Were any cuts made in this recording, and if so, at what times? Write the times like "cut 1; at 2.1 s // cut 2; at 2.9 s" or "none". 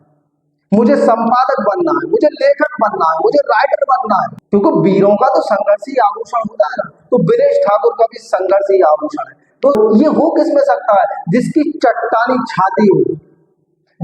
cut 1; at 4.4 s // cut 2; at 9.7 s